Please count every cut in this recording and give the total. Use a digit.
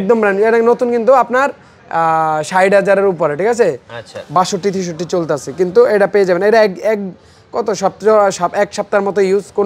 0